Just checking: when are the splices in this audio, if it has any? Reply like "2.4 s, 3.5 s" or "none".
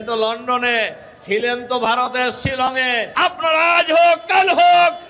3.1 s